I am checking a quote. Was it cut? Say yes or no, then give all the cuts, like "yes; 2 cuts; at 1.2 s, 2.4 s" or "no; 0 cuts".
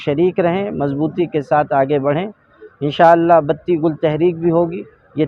no; 0 cuts